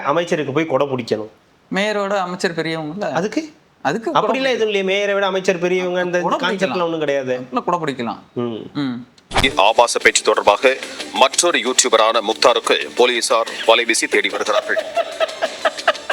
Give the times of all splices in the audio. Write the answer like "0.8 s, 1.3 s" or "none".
9.4 s